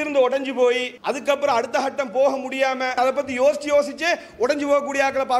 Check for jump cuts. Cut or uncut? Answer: cut